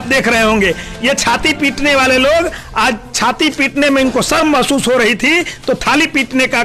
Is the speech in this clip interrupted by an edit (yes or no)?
no